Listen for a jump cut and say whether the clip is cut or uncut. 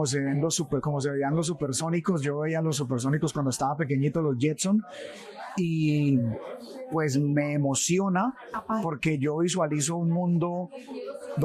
uncut